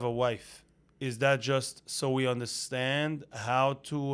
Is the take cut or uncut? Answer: uncut